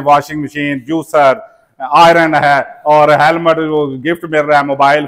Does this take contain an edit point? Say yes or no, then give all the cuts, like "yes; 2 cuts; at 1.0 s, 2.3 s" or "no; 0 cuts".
no; 0 cuts